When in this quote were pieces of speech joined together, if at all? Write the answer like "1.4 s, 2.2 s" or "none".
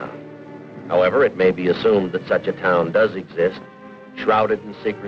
1.5 s